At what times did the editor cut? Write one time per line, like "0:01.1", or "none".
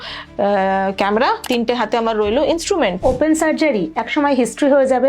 0:01.4
0:03.0